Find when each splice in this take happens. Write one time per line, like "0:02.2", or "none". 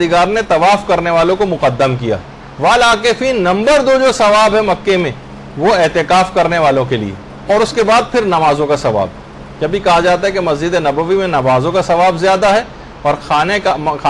0:07.0